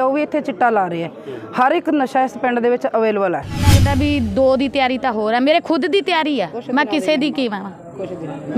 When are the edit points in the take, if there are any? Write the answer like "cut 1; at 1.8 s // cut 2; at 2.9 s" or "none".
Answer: cut 1; at 3.8 s